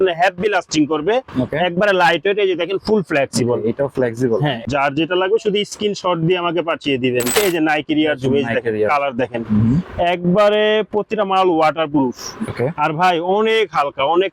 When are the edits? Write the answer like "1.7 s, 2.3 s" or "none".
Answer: 4.6 s, 7.3 s